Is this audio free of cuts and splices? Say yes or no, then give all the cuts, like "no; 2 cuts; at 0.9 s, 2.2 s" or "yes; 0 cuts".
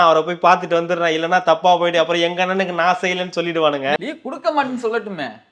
no; 1 cut; at 4.0 s